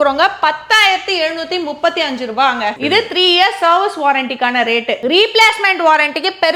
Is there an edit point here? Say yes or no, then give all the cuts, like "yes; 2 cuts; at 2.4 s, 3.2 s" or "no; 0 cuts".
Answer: no; 0 cuts